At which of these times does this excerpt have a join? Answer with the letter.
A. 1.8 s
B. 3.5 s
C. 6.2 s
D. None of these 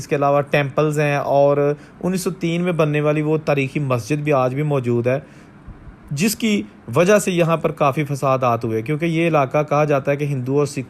D